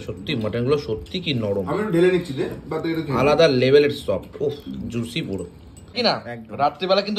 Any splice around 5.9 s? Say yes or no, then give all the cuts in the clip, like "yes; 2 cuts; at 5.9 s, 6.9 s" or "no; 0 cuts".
yes; 1 cut; at 5.9 s